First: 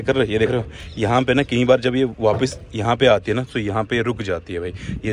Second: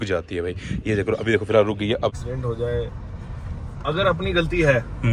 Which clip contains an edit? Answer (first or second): second